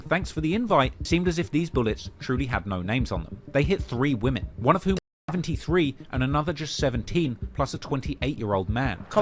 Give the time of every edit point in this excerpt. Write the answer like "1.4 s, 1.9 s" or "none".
1.0 s